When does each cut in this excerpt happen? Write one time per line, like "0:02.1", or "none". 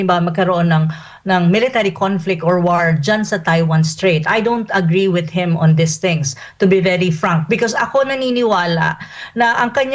none